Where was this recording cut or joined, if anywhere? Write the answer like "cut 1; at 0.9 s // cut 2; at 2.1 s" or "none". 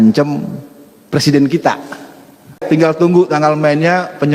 cut 1; at 2.6 s